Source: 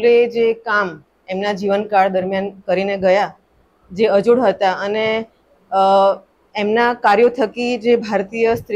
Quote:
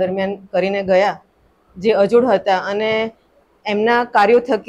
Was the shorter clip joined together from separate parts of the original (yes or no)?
yes